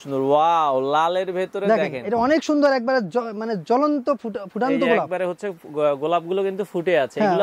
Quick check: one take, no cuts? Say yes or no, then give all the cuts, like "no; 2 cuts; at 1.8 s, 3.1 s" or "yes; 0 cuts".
yes; 0 cuts